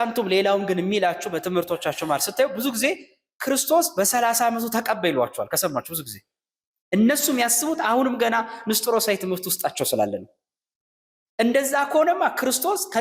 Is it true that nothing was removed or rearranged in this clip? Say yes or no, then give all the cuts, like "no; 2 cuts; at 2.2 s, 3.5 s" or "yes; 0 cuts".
yes; 0 cuts